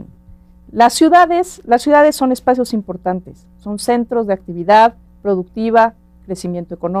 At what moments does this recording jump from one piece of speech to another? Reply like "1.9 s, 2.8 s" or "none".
4.1 s